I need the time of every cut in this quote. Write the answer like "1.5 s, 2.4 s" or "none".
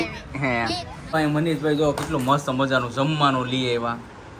1.1 s